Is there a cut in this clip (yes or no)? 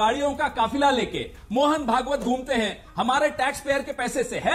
no